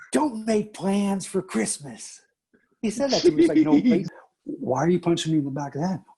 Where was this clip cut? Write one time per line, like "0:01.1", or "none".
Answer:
0:04.1